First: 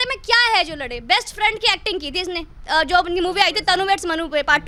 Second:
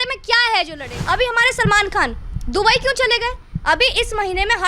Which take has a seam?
second; 1 cut; at 0.9 s

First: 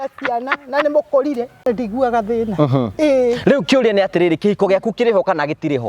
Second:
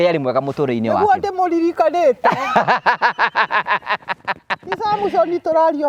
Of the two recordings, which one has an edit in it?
first; 1 cut; at 1.6 s

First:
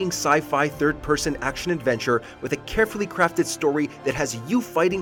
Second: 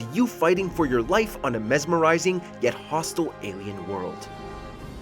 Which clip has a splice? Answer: second; 1 cut; at 4.1 s

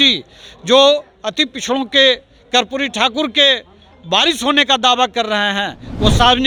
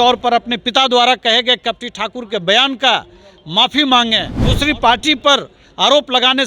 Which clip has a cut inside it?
second; 1 cut; at 4.4 s

